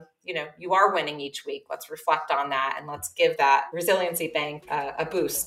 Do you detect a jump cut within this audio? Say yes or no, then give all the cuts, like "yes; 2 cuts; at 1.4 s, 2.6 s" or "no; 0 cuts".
yes; 2 cuts; at 3.7 s, 4.6 s